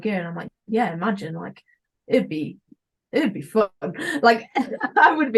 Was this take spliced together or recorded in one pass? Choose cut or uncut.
uncut